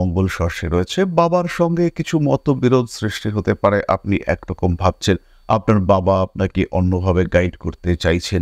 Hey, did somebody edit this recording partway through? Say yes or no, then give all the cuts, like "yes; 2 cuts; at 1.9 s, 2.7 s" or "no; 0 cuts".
no; 0 cuts